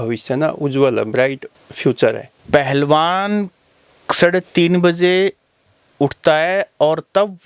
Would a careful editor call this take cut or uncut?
cut